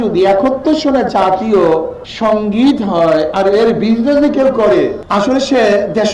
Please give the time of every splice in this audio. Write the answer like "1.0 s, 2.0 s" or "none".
2.0 s, 5.0 s